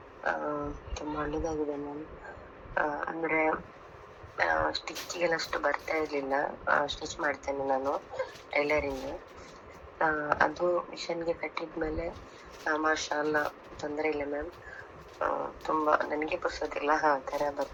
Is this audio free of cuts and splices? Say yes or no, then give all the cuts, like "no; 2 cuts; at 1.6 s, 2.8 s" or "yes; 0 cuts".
yes; 0 cuts